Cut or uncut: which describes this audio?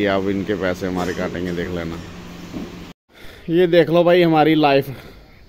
cut